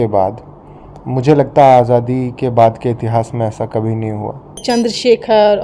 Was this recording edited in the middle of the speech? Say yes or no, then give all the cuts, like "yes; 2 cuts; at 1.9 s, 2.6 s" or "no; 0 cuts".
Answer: yes; 1 cut; at 4.6 s